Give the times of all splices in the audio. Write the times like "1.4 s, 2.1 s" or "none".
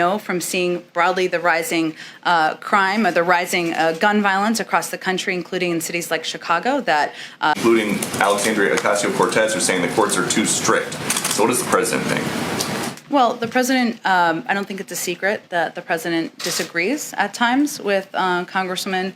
7.6 s

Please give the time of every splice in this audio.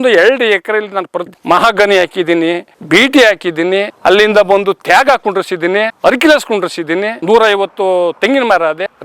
1.3 s

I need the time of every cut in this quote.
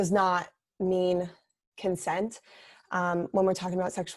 none

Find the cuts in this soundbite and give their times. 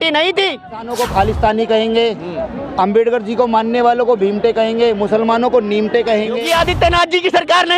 0.9 s, 6.4 s

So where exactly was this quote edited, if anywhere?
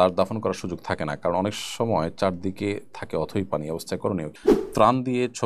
4.4 s

